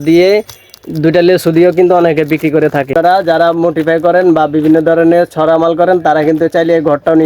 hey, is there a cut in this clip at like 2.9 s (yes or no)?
yes